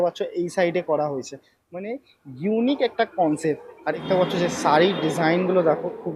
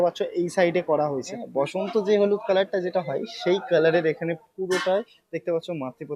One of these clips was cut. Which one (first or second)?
second